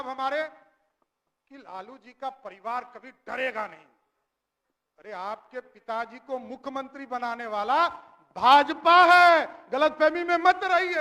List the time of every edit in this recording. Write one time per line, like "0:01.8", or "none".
none